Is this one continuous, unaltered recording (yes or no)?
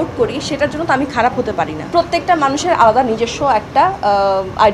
no